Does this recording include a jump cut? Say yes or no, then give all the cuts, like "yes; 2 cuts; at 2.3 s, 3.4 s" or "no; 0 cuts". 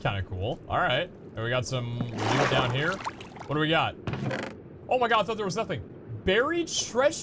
no; 0 cuts